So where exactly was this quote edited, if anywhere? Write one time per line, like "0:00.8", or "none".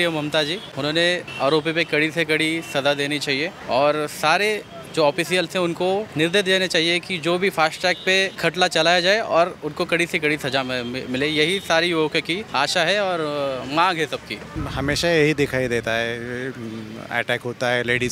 0:00.9
0:03.6
0:06.1
0:08.3
0:12.4
0:14.6